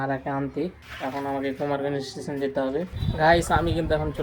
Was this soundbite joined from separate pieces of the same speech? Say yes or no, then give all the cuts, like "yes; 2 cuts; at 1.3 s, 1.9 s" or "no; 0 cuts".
yes; 1 cut; at 3.0 s